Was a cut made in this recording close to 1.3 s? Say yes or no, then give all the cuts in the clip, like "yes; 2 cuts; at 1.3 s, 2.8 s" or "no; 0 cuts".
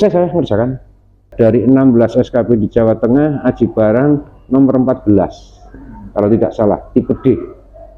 yes; 1 cut; at 1.3 s